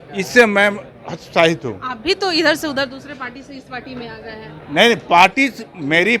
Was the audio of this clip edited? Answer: no; 0 cuts

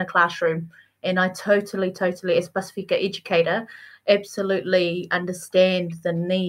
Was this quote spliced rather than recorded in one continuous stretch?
no; 0 cuts

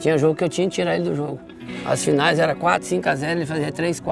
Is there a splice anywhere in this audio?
no; 0 cuts

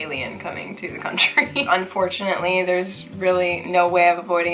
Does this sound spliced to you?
yes; 1 cut; at 1.7 s

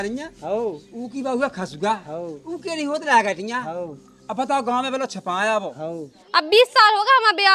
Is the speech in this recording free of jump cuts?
no; 1 cut; at 6.2 s

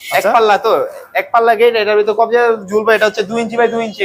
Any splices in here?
no; 0 cuts

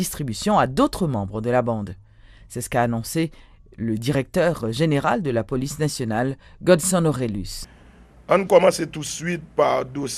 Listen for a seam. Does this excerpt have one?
no; 0 cuts

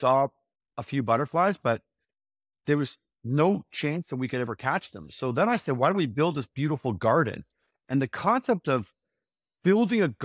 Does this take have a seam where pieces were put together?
no; 0 cuts

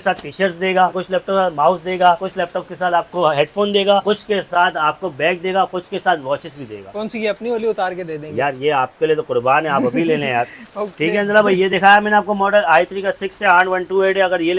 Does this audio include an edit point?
no; 0 cuts

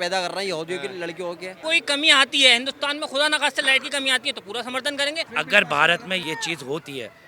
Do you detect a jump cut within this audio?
yes; 3 cuts; at 1.5 s, 5.3 s, 6.2 s

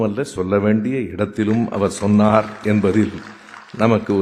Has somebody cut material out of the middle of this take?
no; 0 cuts

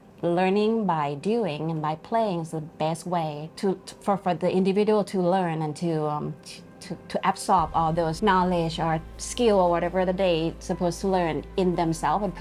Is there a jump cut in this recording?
no; 0 cuts

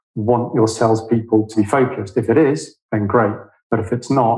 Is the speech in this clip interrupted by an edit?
yes; 1 cut; at 1.5 s

